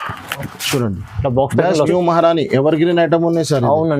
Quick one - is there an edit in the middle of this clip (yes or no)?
yes